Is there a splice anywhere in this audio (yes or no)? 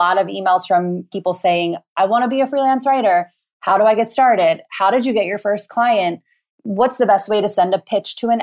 yes